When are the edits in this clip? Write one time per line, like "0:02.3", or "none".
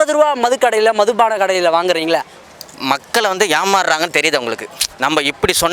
0:02.3